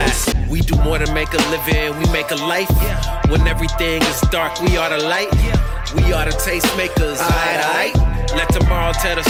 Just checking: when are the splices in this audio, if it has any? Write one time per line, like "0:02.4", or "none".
none